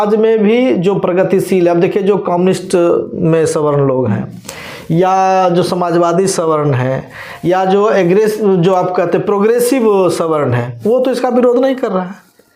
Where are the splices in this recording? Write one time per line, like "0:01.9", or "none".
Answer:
none